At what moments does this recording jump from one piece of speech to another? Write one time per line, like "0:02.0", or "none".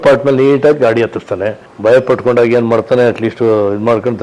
0:01.7